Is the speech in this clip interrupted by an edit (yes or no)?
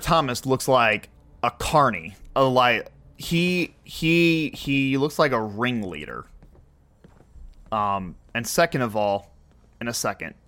no